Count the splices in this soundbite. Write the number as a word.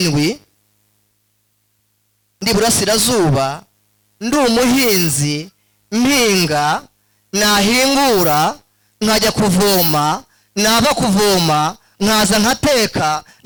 zero